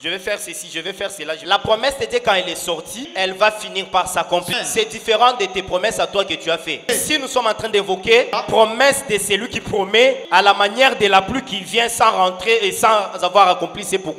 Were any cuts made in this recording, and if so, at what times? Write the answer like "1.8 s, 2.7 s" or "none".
1.4 s, 3.1 s, 4.5 s, 6.8 s, 8.4 s, 10.2 s